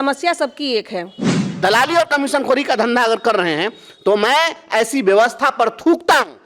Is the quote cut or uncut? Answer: cut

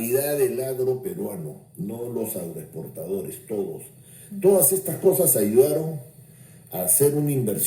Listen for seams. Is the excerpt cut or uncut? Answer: uncut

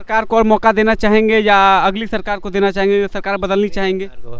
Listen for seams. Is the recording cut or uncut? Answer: uncut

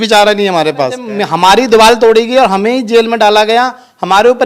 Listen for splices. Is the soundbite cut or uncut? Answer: cut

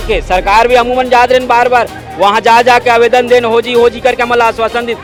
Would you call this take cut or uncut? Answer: uncut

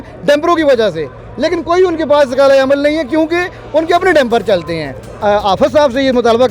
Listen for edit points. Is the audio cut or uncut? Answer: cut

